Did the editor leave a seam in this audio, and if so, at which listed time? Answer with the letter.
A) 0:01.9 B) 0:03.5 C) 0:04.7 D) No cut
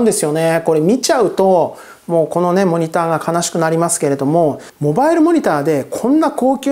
C